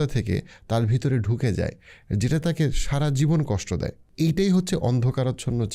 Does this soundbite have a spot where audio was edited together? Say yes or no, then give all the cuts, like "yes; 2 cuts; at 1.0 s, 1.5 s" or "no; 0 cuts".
yes; 1 cut; at 4.0 s